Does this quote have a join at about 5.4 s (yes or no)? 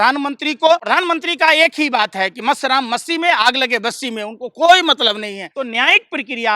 yes